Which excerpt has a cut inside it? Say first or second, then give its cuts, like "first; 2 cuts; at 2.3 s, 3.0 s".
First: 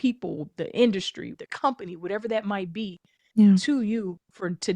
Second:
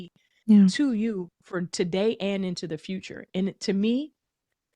first; 1 cut; at 1.3 s